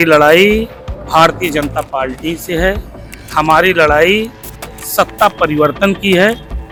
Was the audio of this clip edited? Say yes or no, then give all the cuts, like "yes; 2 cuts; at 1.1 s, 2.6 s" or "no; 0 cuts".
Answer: no; 0 cuts